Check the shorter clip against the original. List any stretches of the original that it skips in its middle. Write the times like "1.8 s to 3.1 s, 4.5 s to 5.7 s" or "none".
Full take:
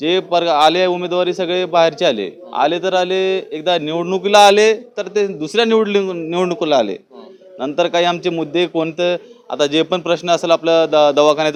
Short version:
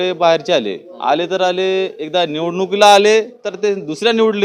none